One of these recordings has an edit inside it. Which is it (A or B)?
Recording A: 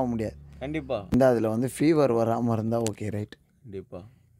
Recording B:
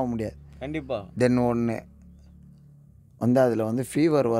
A